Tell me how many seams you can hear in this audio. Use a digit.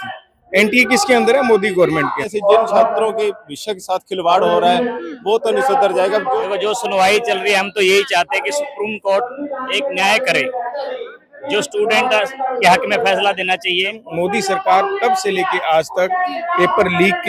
3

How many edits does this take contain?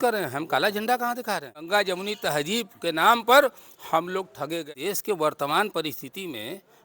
2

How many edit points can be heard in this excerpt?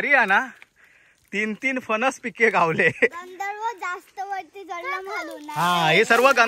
0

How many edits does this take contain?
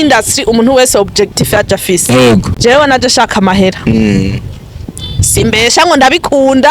1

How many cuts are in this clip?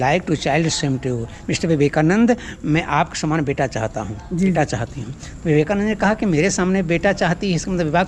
1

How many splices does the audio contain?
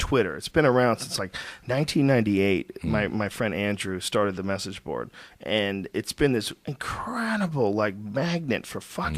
1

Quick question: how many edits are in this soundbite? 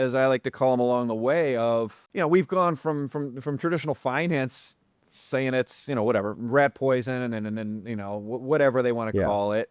1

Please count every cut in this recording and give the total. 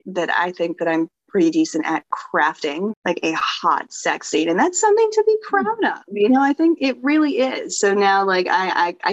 1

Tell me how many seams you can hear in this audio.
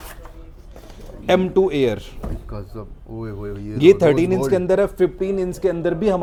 0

